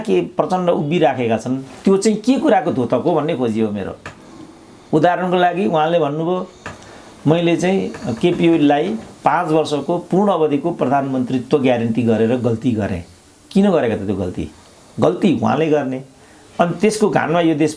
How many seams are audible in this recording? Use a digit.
0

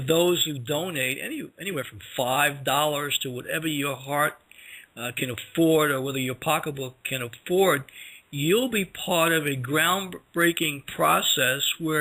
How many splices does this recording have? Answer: 1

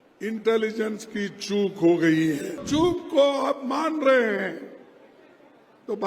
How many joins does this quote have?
1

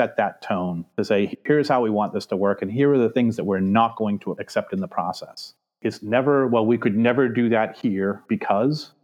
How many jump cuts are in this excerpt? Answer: 2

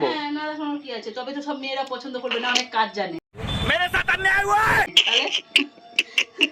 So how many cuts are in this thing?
0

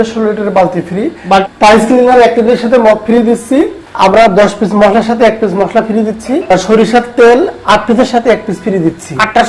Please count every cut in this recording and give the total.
3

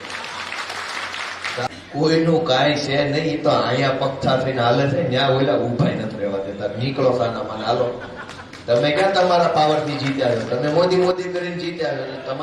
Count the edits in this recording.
1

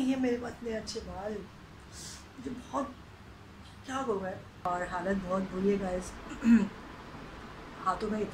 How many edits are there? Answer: 1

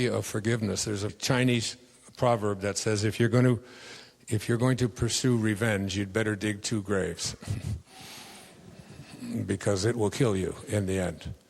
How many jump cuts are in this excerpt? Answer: 1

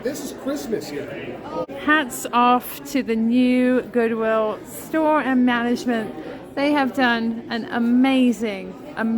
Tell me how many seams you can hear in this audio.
1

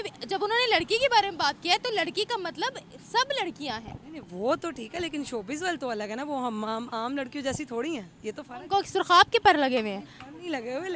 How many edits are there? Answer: 0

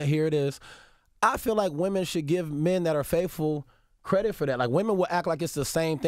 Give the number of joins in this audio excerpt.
0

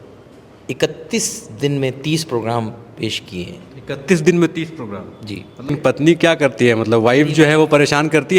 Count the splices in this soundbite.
1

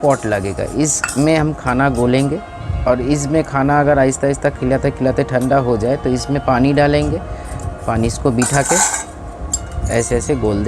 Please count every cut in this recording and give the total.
0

